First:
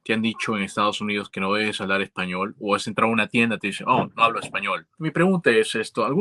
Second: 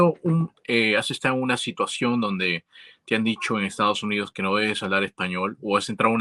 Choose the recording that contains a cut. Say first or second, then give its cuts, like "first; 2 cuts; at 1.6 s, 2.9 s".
first; 1 cut; at 4.8 s